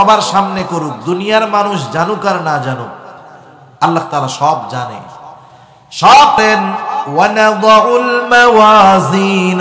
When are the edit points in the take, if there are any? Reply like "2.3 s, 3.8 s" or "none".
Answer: 6.4 s